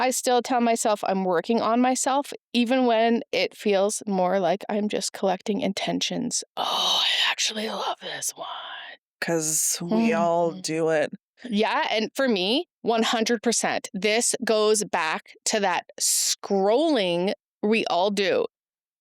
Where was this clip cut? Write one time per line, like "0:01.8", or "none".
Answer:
0:09.1